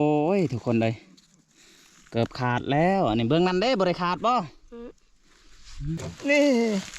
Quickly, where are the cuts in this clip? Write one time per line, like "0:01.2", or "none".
0:06.1